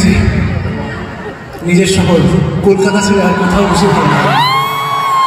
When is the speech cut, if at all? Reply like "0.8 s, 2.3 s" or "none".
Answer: none